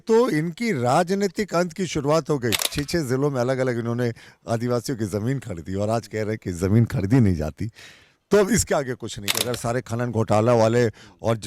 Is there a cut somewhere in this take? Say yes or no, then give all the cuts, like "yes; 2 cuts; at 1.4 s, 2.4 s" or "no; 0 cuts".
yes; 2 cuts; at 2.7 s, 9.4 s